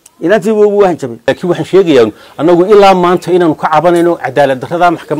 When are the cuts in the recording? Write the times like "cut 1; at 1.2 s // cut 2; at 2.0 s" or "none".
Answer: cut 1; at 1.3 s

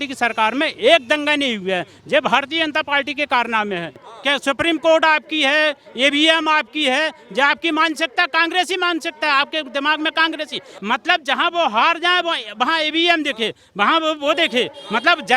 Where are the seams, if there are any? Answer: cut 1; at 4.1 s // cut 2; at 10.7 s

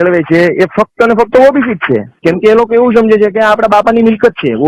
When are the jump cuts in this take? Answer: cut 1; at 2.1 s

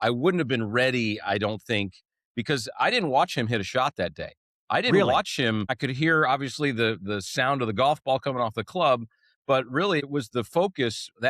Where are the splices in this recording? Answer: cut 1; at 5.8 s // cut 2; at 10.0 s

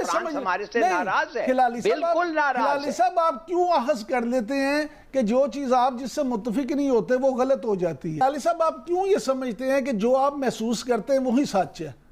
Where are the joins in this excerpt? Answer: cut 1; at 8.2 s

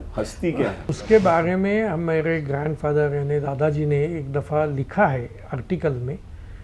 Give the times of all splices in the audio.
cut 1; at 1.0 s

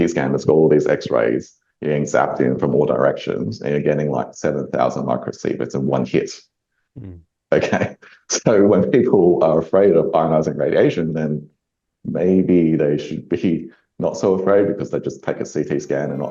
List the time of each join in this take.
none

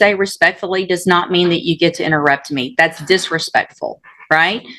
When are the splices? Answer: none

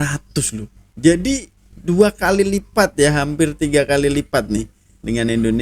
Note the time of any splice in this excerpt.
none

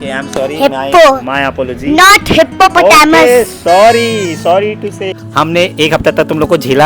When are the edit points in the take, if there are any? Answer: cut 1; at 4.4 s // cut 2; at 5.2 s

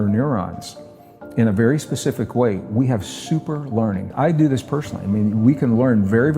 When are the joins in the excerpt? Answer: cut 1; at 4.1 s

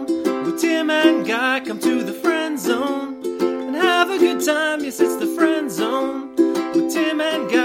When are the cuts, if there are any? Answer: none

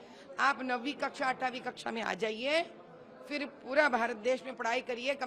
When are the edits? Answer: none

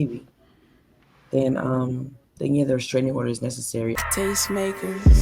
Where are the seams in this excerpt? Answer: cut 1; at 4.0 s

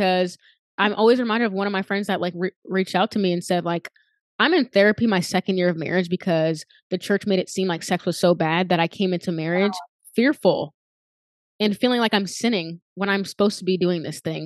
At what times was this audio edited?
none

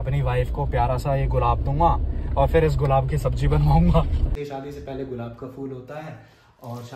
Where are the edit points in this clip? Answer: cut 1; at 4.3 s

